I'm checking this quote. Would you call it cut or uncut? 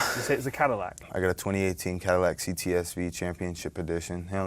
cut